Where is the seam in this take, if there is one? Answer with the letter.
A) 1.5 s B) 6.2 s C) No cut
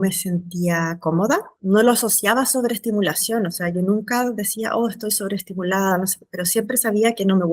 A